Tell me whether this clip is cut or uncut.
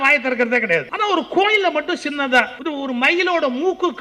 cut